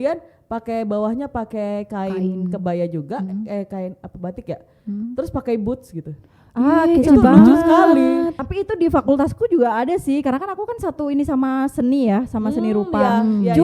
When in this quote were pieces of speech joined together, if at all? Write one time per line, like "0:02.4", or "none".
0:08.4